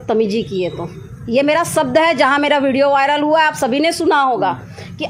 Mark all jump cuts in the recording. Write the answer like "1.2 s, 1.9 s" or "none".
none